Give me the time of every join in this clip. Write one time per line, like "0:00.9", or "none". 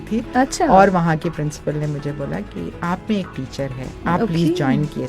0:03.9